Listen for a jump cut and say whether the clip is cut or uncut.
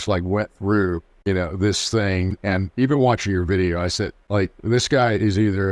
cut